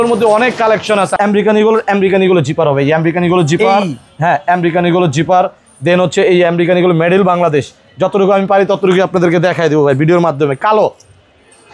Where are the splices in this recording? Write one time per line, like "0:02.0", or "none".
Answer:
0:01.1